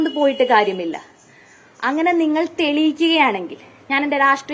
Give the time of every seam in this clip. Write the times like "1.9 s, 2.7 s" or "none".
none